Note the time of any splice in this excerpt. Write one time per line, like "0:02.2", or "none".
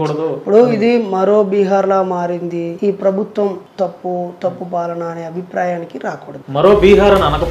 0:02.7
0:03.6
0:06.3